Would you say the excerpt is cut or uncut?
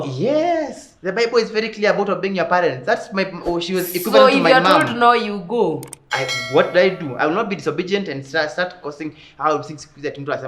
uncut